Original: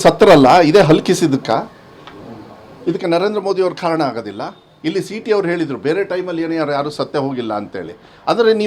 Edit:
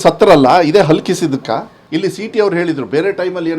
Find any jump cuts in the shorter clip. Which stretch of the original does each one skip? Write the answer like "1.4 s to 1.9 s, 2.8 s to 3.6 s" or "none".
1.8 s to 4.7 s